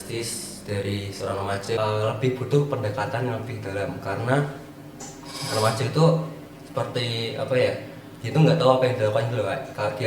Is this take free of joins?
no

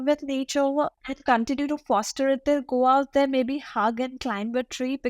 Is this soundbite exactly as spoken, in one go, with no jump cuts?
no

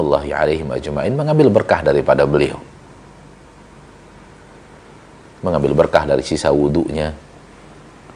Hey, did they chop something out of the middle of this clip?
no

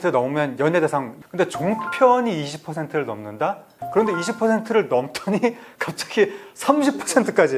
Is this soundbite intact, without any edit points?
yes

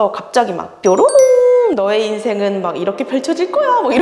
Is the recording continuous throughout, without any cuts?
yes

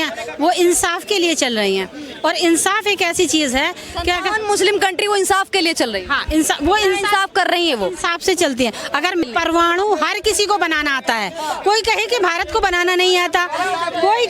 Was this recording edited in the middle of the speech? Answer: yes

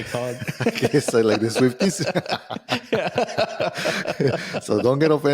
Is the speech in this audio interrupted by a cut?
no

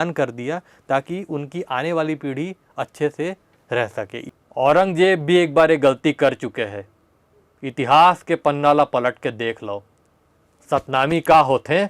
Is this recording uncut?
no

